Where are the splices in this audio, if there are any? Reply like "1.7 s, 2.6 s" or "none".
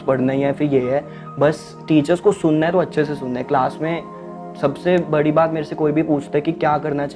none